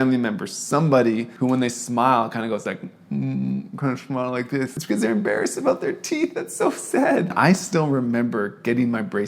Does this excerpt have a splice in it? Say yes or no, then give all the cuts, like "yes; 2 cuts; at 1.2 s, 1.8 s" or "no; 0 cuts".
yes; 2 cuts; at 4.8 s, 7.3 s